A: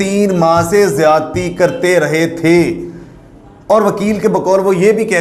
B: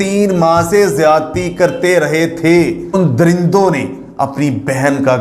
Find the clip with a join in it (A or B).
B